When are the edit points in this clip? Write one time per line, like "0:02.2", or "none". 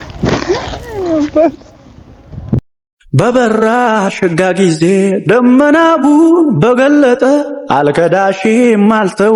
none